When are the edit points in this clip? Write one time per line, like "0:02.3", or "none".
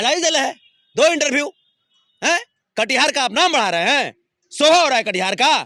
none